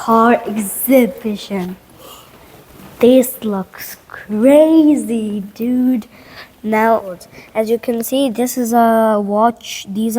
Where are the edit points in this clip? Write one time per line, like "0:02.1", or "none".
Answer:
0:07.4